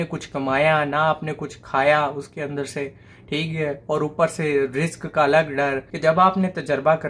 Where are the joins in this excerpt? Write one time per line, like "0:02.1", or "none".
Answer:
0:05.9

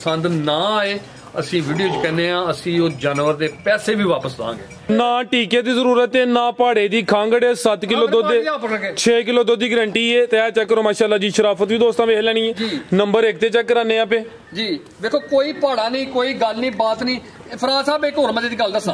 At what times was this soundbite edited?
0:04.9

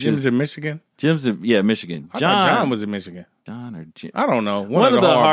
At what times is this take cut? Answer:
0:03.3

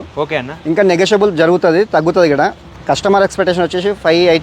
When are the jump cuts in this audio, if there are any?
0:02.7

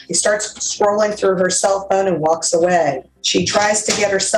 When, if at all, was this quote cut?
0:03.1

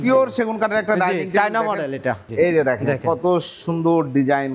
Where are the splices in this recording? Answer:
0:02.3

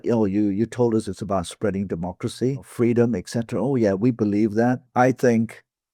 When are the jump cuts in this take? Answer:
0:02.7
0:04.8

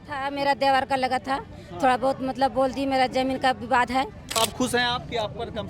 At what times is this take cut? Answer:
0:04.4

